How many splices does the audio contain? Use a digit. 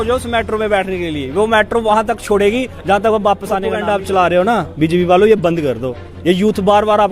1